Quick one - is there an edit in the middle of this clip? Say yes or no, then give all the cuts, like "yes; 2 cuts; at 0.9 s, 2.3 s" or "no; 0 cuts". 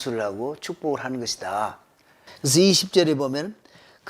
no; 0 cuts